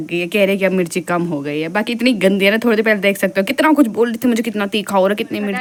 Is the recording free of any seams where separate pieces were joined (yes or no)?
yes